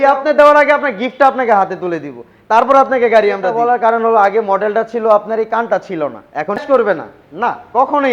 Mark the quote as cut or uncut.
cut